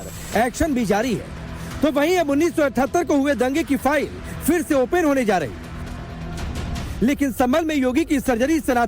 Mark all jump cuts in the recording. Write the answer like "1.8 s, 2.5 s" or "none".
7.3 s